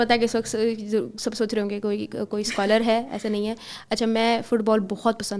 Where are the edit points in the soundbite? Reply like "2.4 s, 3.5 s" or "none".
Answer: none